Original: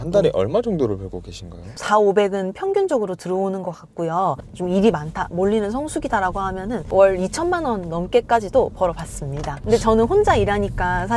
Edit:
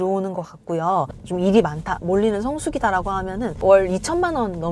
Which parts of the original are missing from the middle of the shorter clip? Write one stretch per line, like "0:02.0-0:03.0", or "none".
none